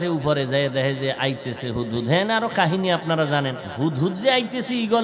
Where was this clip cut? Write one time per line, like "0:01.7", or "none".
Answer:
0:03.6